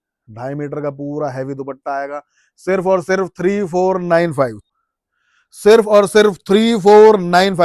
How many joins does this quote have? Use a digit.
1